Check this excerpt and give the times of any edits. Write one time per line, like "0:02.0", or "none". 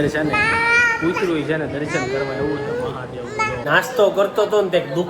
0:03.8